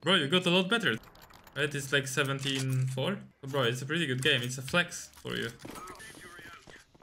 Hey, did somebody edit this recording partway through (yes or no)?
yes